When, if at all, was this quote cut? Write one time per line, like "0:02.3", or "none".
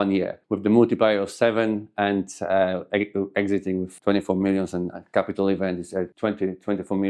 0:06.1